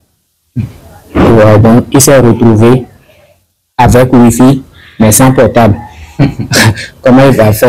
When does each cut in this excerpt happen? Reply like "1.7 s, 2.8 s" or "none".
none